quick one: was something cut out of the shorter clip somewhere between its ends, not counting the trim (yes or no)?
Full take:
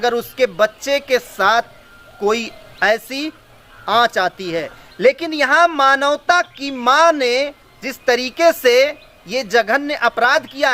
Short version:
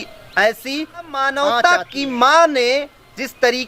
yes